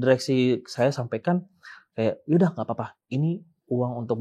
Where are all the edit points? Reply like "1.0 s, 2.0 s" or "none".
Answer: none